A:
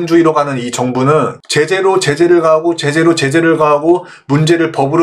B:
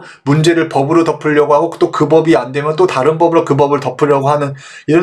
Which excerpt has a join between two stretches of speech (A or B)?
A